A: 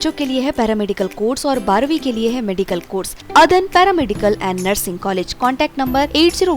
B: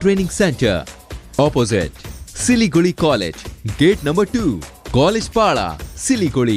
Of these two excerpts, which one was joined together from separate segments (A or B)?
A